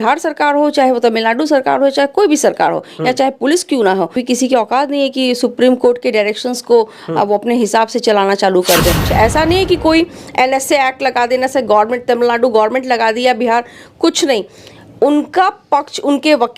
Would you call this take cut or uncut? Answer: cut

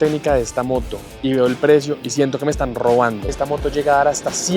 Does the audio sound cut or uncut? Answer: cut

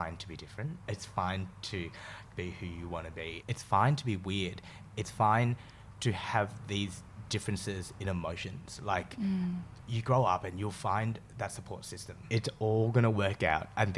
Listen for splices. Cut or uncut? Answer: cut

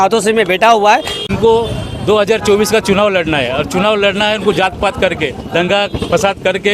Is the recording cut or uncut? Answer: cut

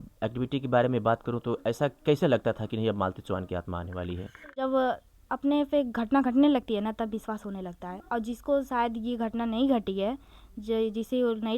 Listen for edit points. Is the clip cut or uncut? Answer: cut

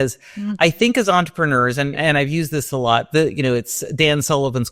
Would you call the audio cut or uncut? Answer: cut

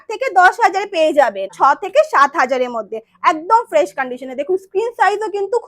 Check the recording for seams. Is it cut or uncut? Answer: cut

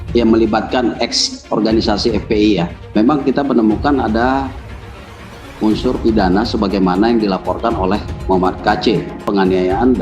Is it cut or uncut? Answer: cut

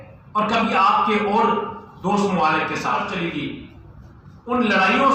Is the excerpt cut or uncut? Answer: cut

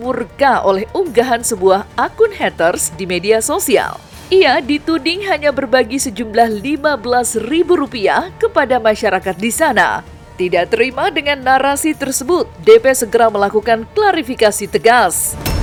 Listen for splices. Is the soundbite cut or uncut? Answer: uncut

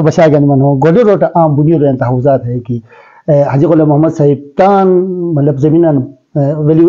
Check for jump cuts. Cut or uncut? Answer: uncut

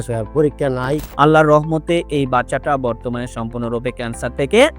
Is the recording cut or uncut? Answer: cut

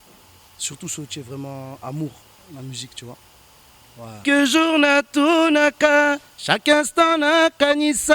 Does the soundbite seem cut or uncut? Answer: cut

